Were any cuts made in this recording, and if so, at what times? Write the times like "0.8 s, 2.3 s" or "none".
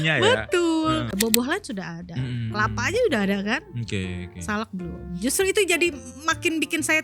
1.1 s